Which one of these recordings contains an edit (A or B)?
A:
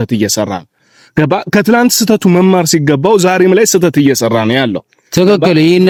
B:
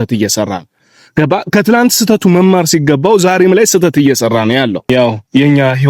B